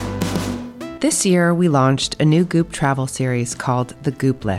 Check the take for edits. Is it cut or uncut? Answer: cut